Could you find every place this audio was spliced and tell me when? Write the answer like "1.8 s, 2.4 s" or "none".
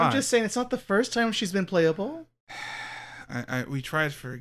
none